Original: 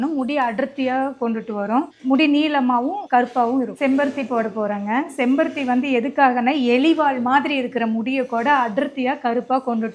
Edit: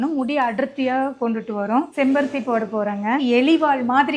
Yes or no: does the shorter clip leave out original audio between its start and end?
yes